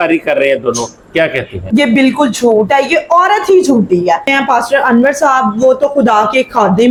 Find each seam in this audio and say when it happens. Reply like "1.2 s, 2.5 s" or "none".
none

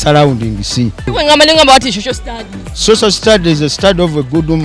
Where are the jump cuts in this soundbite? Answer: 1.1 s

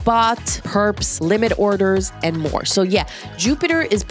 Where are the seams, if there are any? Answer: none

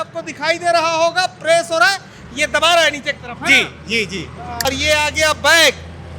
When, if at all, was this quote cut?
4.7 s

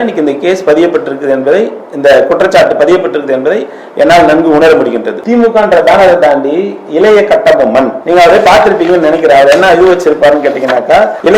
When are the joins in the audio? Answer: 5.1 s

